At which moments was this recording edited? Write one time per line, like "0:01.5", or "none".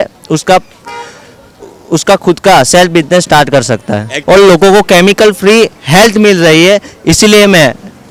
0:04.1